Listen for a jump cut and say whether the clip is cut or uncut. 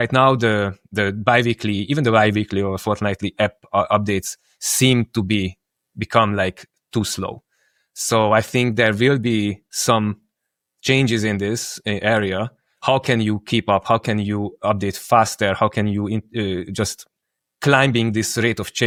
uncut